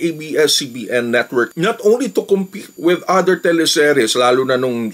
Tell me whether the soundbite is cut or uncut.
cut